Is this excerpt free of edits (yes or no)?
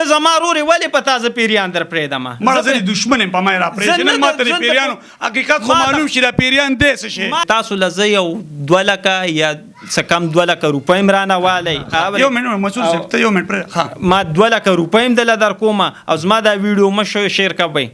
no